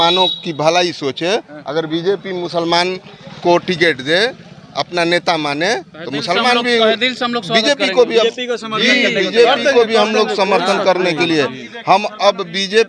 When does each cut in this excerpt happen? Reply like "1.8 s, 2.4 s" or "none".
none